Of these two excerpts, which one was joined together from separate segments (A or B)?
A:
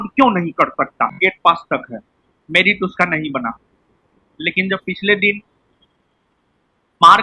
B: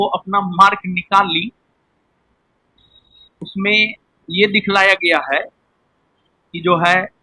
A